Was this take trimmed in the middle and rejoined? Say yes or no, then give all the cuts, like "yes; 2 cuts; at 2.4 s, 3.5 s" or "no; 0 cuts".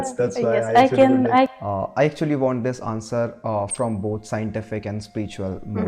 yes; 1 cut; at 1.5 s